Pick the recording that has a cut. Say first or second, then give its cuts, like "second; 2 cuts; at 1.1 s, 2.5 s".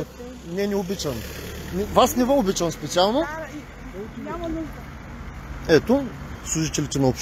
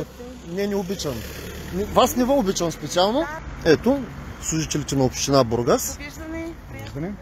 second; 1 cut; at 3.4 s